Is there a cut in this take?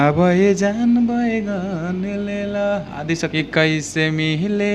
yes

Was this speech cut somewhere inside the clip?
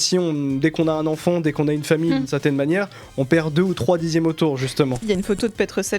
yes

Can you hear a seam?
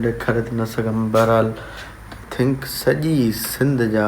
yes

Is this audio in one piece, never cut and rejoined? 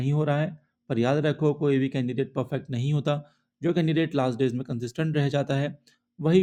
yes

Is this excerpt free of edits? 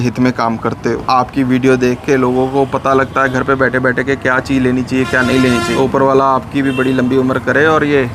no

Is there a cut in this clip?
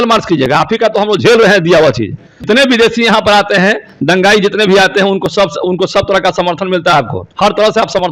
yes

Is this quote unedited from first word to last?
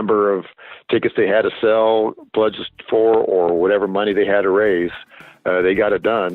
yes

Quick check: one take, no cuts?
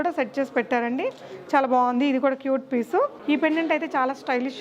no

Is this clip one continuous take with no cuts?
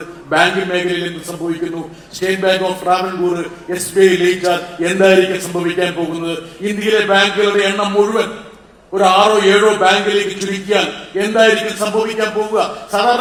yes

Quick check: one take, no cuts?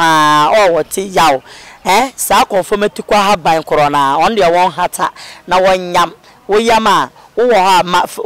yes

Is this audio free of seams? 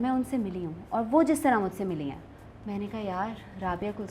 yes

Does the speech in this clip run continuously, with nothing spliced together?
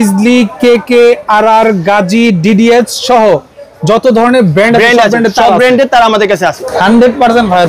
no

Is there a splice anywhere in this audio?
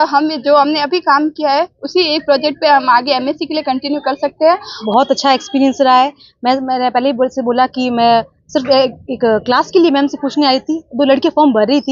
yes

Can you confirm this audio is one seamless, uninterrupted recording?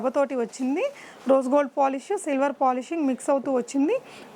yes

